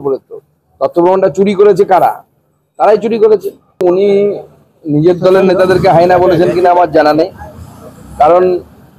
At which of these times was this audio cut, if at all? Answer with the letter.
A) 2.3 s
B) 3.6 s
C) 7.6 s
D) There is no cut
B